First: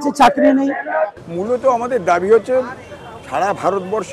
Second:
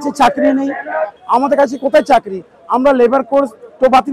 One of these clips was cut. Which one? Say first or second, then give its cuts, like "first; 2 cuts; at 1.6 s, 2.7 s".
first; 1 cut; at 1.2 s